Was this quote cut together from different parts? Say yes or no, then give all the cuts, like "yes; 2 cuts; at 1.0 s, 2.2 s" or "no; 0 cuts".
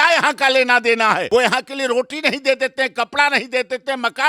yes; 1 cut; at 1.2 s